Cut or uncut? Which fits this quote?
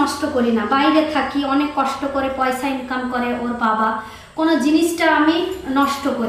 uncut